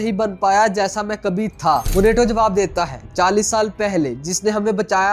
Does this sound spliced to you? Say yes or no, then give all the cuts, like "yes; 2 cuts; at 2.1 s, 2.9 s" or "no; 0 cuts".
yes; 1 cut; at 1.9 s